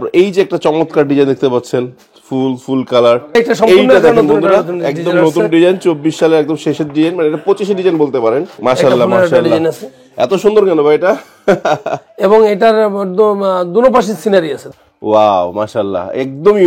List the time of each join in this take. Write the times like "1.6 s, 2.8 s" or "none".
3.4 s, 8.5 s, 14.6 s